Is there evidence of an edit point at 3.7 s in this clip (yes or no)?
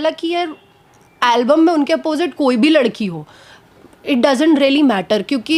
no